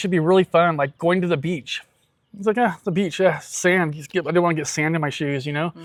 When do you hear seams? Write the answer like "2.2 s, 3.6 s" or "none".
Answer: none